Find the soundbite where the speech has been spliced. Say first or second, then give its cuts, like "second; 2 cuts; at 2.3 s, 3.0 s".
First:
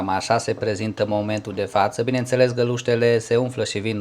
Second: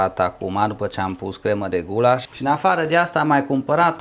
second; 1 cut; at 2.3 s